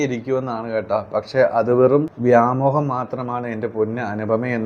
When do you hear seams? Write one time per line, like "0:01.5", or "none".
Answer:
0:02.1